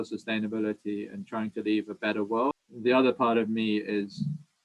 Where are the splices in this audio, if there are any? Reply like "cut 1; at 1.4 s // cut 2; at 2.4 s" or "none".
cut 1; at 2.5 s